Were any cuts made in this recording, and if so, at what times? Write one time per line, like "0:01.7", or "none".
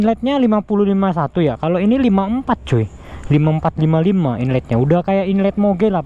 none